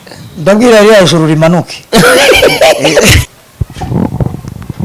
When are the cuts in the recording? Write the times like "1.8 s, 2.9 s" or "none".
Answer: 3.2 s